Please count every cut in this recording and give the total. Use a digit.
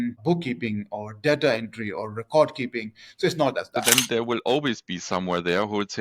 1